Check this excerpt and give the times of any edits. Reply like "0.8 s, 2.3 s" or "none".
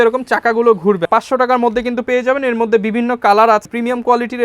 1.1 s, 3.6 s